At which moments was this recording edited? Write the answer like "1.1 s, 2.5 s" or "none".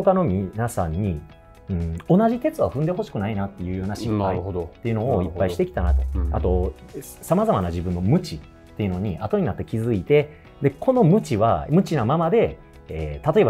none